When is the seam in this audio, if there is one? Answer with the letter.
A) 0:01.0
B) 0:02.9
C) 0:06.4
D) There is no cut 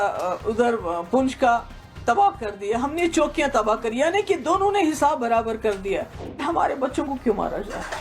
C